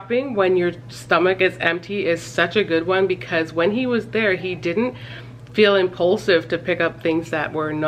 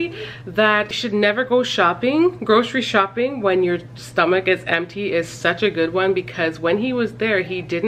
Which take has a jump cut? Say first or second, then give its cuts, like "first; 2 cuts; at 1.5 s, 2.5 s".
second; 1 cut; at 1.0 s